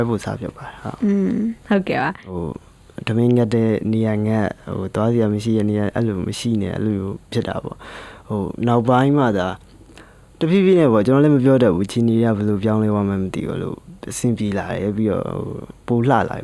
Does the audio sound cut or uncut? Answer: cut